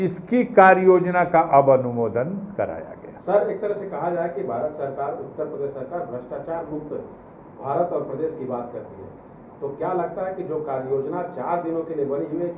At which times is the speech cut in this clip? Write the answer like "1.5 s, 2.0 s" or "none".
none

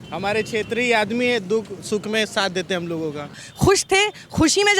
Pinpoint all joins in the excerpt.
3.4 s

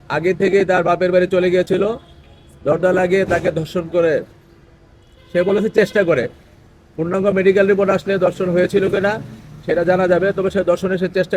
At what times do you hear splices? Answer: none

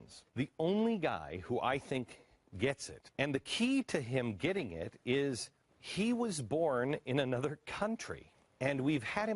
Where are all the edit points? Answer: 5.5 s

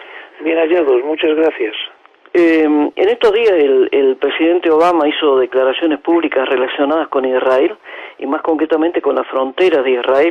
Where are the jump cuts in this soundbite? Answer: none

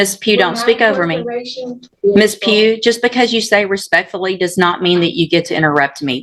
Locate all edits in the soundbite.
1.9 s

